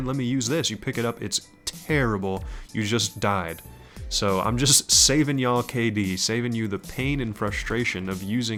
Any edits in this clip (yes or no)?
no